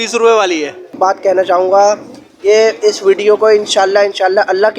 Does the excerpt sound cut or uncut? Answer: cut